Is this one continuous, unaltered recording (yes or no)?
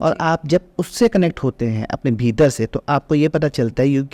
yes